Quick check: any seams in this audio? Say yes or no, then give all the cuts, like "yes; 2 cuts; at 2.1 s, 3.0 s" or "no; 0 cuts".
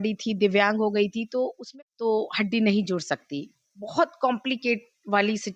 yes; 1 cut; at 1.6 s